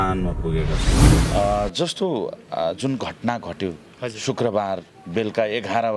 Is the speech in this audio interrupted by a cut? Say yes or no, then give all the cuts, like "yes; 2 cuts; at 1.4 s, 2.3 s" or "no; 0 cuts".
yes; 1 cut; at 1.2 s